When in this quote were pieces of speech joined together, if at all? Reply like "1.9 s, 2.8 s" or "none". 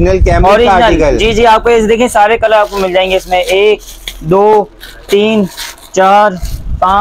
none